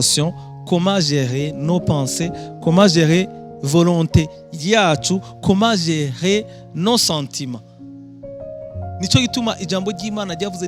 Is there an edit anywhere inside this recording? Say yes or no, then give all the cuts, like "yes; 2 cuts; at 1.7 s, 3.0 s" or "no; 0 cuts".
no; 0 cuts